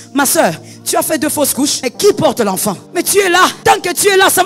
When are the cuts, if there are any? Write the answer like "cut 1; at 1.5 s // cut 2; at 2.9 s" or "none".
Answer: cut 1; at 1.8 s // cut 2; at 2.8 s // cut 3; at 3.6 s